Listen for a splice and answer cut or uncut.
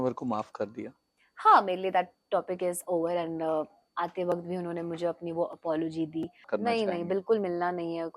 cut